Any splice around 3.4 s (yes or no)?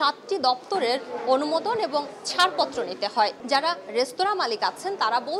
yes